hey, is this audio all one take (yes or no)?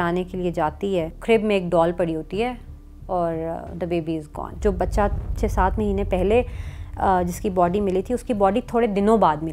no